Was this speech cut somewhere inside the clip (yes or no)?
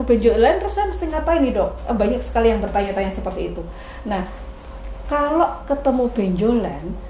no